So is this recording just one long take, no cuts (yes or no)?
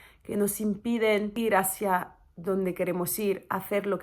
no